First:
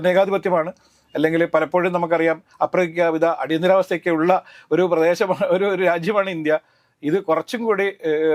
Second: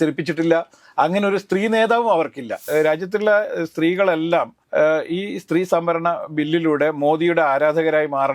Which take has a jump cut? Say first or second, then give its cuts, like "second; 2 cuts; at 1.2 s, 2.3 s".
second; 2 cuts; at 2.6 s, 4.6 s